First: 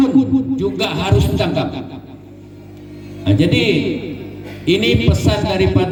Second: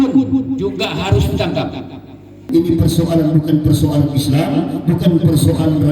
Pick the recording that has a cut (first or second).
second